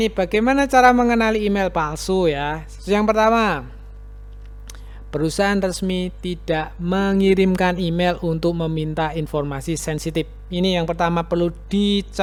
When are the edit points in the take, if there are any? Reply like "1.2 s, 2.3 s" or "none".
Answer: none